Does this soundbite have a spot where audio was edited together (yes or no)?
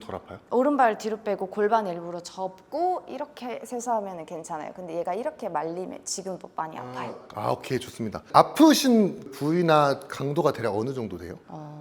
no